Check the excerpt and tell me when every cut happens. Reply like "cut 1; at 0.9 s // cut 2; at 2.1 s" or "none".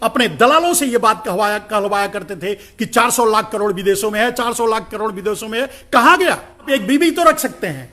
cut 1; at 6.7 s